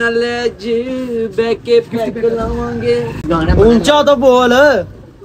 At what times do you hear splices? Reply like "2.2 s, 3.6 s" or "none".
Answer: 3.2 s